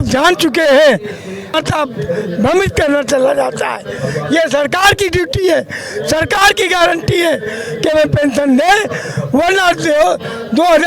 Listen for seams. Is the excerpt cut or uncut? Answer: cut